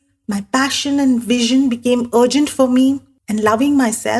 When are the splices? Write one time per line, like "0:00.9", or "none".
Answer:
0:03.1

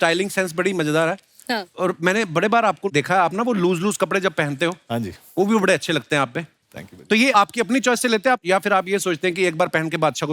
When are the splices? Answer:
none

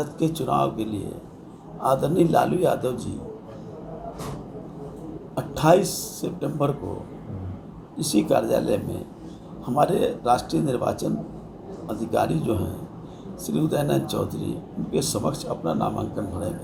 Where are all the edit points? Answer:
none

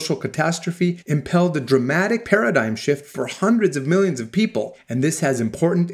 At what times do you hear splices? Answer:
0:01.0
0:02.2
0:04.8

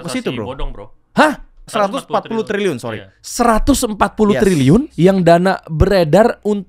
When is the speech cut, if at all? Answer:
0:01.9
0:04.9

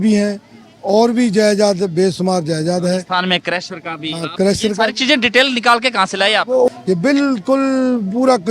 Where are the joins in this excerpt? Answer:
0:06.7

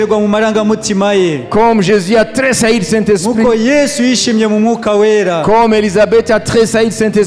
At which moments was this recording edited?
none

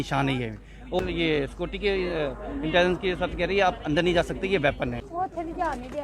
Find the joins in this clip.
0:01.0
0:05.0

